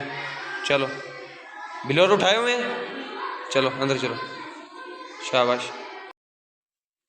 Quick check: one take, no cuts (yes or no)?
yes